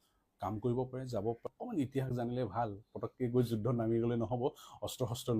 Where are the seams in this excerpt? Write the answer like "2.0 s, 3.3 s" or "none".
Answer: 1.4 s